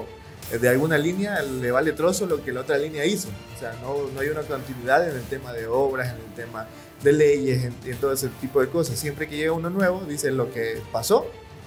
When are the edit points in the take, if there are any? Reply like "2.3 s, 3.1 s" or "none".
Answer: none